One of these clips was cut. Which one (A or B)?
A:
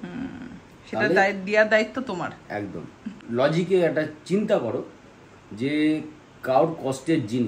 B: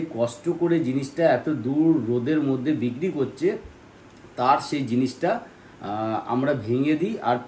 A